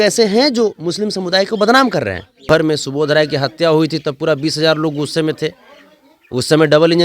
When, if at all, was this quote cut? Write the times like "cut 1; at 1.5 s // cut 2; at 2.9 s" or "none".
cut 1; at 2.5 s